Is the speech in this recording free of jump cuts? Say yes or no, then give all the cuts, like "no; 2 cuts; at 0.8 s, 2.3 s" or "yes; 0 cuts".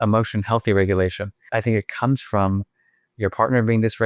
no; 1 cut; at 1.4 s